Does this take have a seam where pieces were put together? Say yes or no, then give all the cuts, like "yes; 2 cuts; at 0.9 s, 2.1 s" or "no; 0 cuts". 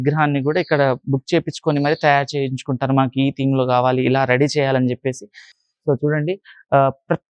no; 0 cuts